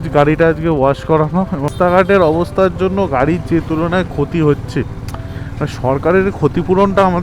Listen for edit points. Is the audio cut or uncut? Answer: cut